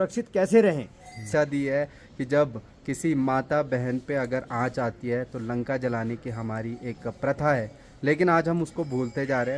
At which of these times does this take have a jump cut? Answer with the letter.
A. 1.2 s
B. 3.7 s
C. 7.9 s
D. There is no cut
A